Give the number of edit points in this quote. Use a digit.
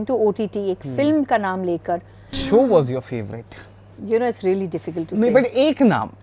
1